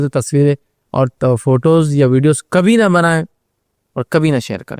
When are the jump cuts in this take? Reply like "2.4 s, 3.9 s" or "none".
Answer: none